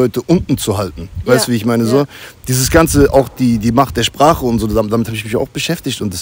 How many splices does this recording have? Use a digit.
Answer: 0